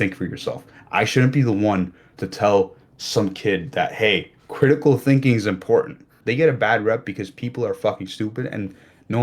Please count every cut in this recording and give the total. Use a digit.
1